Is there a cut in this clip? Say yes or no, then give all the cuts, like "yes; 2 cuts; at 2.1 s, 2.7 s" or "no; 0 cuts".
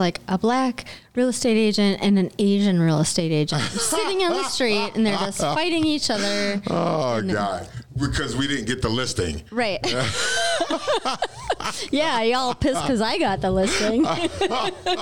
no; 0 cuts